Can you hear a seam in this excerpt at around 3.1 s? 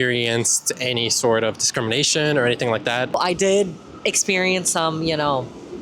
yes; 1 cut; at 3.1 s

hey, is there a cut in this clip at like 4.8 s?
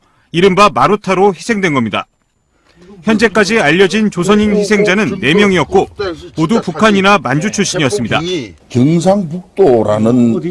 yes; 1 cut; at 4.8 s

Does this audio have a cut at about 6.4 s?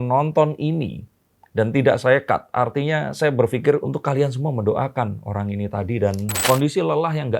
yes; 1 cut; at 6.4 s

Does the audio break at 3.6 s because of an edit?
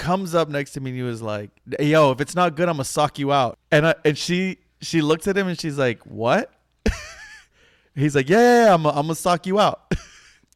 yes; 1 cut; at 3.6 s

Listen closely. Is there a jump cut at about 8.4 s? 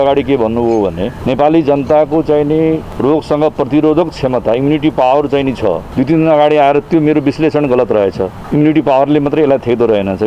yes; 4 cuts; at 1.1 s, 2.9 s, 5.8 s, 8.4 s

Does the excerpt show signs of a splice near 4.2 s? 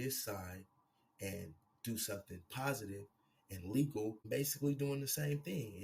yes; 1 cut; at 4.2 s

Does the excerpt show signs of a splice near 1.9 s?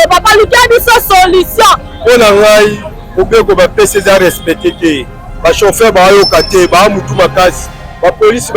yes; 1 cut; at 1.9 s

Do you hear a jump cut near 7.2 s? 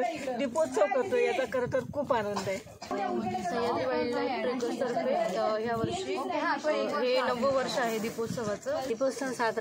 no; 2 cuts; at 2.9 s, 8.9 s

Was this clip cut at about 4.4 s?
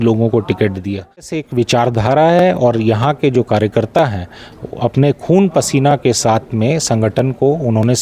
no; 1 cut; at 1.3 s

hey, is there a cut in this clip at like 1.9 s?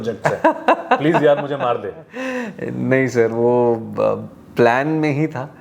no; 0 cuts

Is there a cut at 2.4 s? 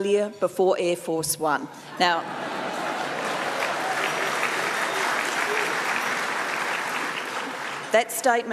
yes; 1 cut; at 2.4 s

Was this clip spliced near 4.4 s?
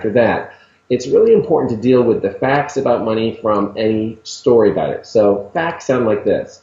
no; 1 cut; at 2.2 s

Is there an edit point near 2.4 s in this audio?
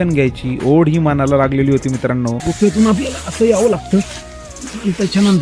yes; 1 cut; at 2.4 s

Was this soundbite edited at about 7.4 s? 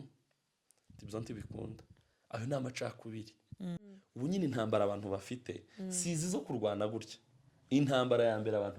no; 1 cut; at 4.0 s

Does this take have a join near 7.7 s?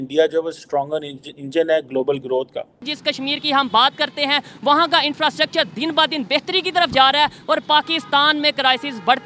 no; 1 cut; at 2.9 s

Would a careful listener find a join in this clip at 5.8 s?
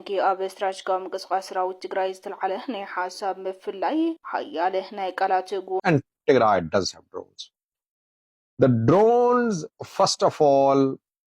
yes; 1 cut; at 5.8 s

